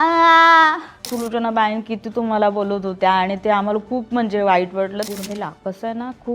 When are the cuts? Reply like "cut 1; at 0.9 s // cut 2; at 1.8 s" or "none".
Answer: cut 1; at 1.1 s // cut 2; at 5.1 s